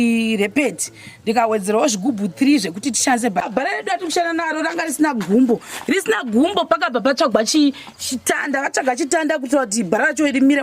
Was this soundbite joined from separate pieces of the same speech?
yes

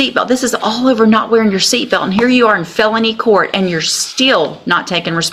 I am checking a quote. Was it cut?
no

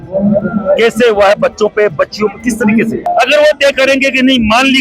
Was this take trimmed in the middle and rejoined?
yes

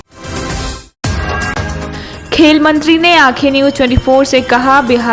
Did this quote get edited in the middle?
no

